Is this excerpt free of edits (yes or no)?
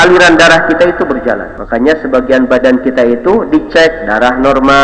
no